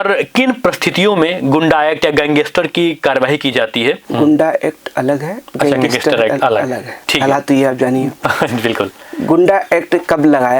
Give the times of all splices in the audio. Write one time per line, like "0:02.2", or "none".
0:04.0

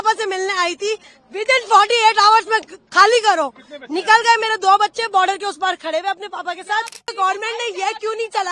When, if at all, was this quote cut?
0:07.1

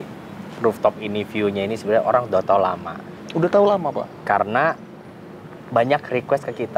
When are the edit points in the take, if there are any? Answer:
none

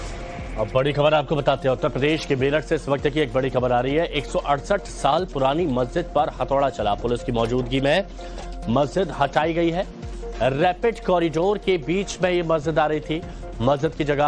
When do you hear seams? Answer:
0:07.7

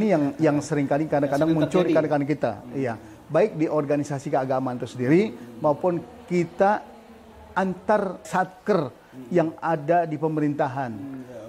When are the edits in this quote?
0:08.3

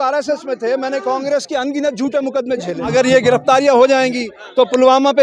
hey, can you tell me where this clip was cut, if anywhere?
0:02.9

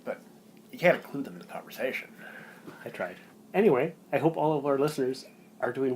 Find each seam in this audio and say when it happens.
0:03.3

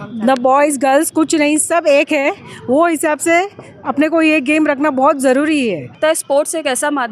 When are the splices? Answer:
0:06.0

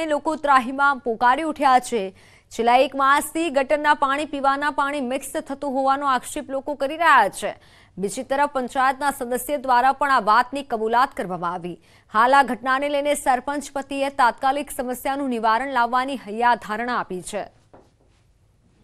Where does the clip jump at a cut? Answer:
0:17.9

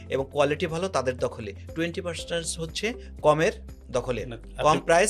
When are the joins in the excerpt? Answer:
none

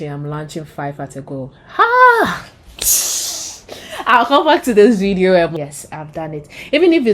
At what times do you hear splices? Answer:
0:05.5

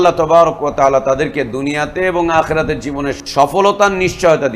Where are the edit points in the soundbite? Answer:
0:03.1

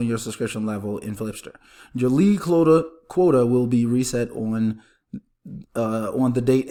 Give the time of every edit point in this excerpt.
none

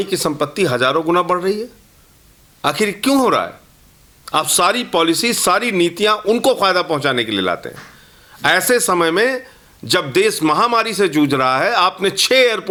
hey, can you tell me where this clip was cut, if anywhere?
none

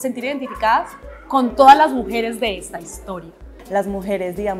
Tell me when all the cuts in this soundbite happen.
0:03.5

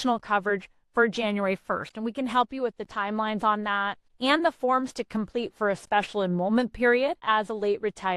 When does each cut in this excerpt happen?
0:04.0
0:07.2

